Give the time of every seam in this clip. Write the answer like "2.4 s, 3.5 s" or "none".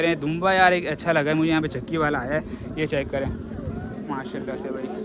none